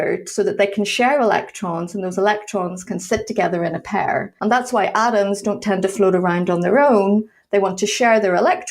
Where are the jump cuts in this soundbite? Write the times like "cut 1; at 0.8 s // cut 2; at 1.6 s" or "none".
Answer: cut 1; at 4.3 s